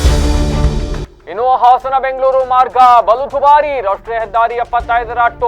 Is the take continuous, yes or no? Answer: no